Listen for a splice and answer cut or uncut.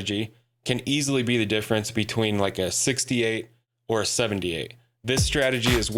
uncut